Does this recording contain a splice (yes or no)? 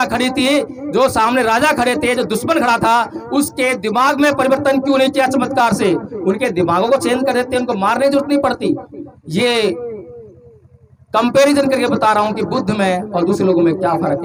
no